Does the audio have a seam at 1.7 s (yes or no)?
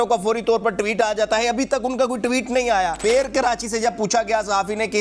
no